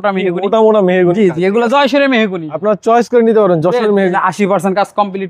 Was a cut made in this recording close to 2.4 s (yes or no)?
no